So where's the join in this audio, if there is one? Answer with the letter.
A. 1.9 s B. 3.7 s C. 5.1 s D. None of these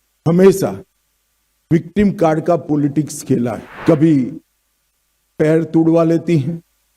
B